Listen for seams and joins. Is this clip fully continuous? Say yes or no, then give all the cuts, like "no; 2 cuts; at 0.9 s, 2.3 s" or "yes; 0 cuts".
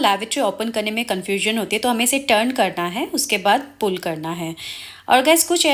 yes; 0 cuts